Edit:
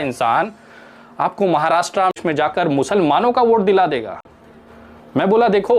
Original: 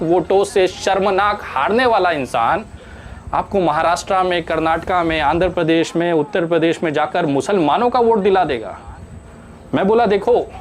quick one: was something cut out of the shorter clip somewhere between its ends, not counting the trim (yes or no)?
yes